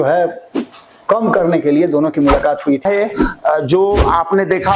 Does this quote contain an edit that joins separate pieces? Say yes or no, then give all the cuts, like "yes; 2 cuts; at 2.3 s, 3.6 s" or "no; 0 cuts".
yes; 1 cut; at 2.8 s